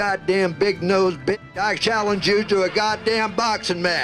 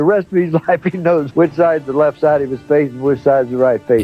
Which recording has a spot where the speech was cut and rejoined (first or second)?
second